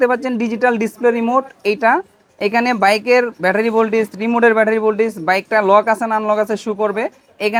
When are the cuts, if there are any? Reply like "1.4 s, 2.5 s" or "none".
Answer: none

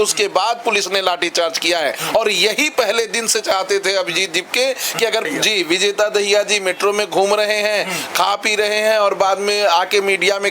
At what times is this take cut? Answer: 5.3 s

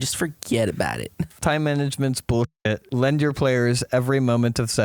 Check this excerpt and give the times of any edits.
1.3 s, 2.8 s

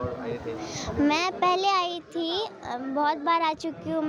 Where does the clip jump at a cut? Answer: none

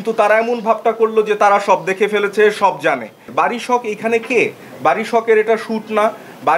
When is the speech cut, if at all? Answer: 3.2 s

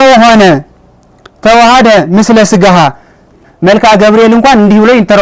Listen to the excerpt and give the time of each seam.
3.5 s

